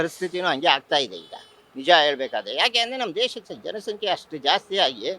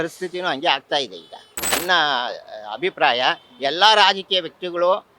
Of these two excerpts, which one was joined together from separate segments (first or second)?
second